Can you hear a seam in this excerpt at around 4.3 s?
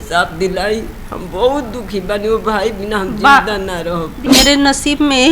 yes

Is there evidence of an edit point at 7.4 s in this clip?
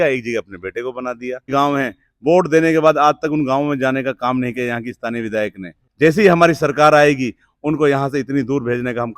no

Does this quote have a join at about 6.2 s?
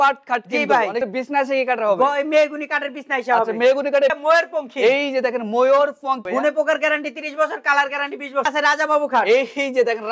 yes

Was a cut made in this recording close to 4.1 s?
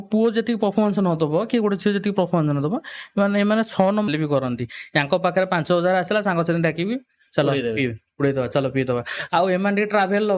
yes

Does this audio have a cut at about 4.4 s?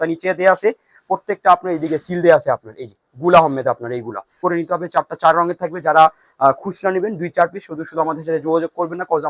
yes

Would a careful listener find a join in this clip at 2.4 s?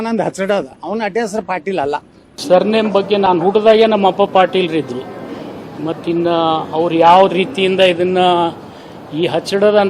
yes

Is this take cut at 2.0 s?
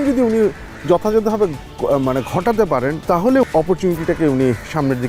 no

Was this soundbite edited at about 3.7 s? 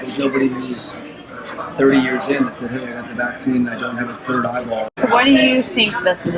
no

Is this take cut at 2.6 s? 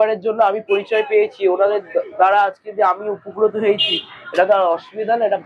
no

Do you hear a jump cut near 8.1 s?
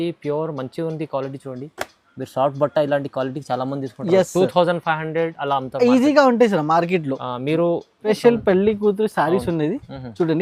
yes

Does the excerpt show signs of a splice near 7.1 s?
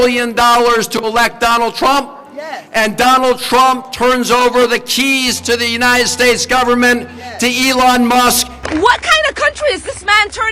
no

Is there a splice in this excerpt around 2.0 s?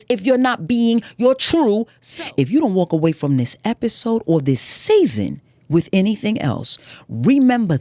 yes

